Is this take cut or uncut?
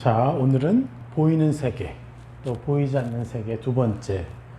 cut